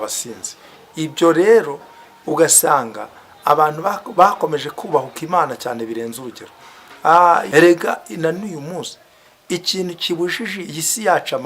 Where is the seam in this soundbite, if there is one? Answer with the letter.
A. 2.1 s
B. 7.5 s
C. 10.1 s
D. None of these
B